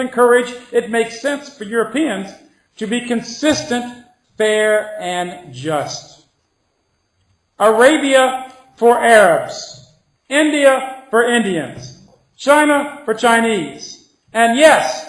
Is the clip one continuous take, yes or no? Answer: no